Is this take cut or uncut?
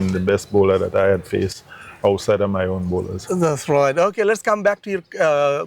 uncut